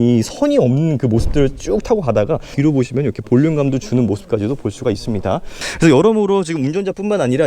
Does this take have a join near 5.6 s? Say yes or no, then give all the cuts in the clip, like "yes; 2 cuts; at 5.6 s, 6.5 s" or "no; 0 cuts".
yes; 2 cuts; at 2.5 s, 5.6 s